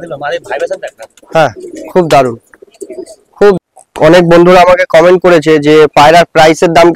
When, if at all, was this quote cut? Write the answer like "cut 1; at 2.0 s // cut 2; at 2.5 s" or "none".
cut 1; at 3.6 s